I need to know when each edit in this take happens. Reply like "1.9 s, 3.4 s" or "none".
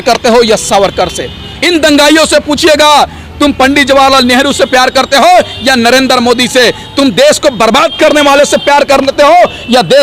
none